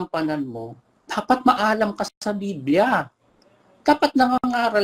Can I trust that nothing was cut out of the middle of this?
yes; 0 cuts

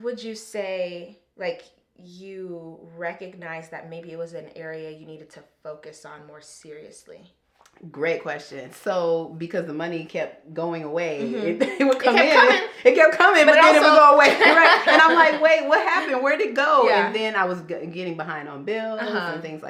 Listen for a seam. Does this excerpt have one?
no; 0 cuts

